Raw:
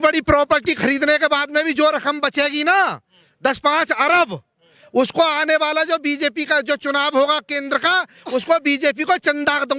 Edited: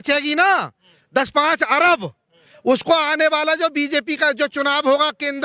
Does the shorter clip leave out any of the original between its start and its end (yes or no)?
no